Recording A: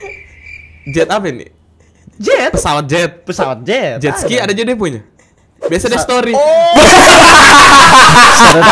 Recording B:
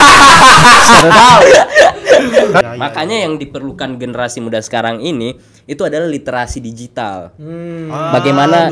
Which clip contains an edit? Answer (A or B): B